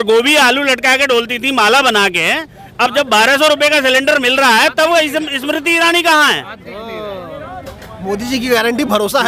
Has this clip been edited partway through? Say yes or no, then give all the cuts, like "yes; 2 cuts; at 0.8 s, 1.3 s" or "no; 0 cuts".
no; 0 cuts